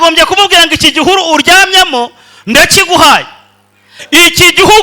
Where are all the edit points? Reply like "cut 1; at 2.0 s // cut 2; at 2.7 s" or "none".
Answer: cut 1; at 3.9 s